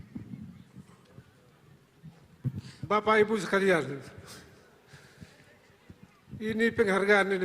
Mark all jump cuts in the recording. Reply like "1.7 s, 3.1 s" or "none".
2.4 s